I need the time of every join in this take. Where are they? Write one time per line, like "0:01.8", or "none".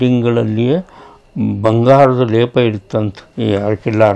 0:03.2